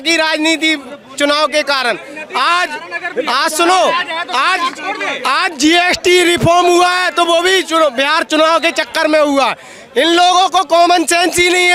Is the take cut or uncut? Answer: uncut